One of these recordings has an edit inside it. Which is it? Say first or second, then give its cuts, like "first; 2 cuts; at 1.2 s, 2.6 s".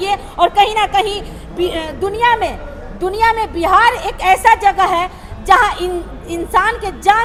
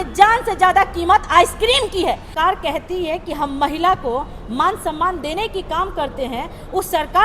second; 1 cut; at 2.3 s